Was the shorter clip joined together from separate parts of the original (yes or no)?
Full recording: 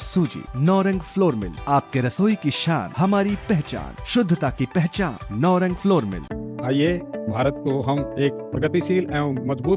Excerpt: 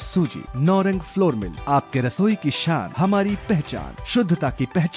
no